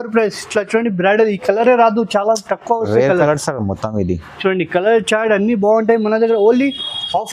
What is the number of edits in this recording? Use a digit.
0